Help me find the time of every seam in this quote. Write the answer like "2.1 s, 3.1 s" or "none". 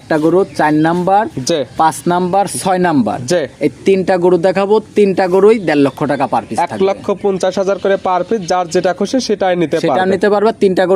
none

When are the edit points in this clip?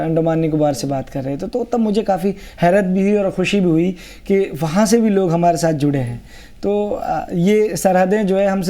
none

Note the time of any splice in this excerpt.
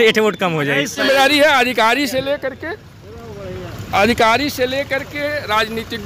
1.0 s

